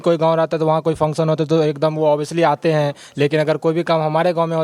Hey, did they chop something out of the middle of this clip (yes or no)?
no